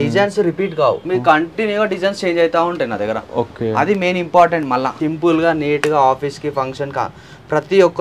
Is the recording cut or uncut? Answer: cut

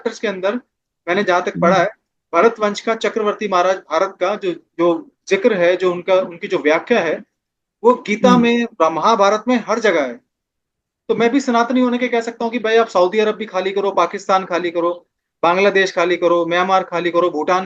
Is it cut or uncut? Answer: uncut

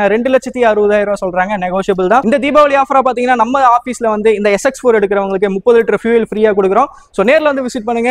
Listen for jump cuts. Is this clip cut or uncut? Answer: cut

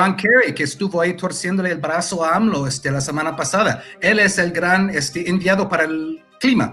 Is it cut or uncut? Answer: uncut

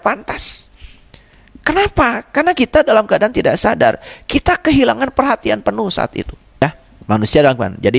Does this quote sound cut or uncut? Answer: cut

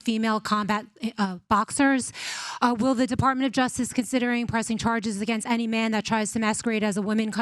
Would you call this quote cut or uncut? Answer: uncut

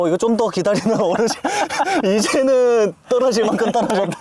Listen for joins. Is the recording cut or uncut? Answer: uncut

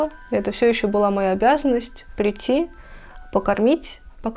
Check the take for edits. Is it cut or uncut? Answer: uncut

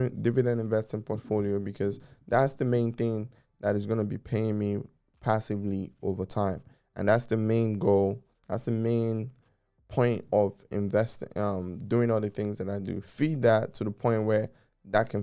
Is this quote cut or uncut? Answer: uncut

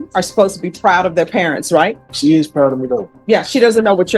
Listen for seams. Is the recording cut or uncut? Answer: cut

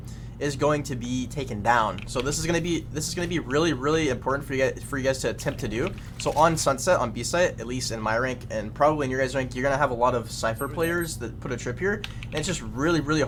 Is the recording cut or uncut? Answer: uncut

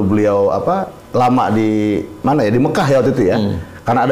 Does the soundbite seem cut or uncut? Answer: uncut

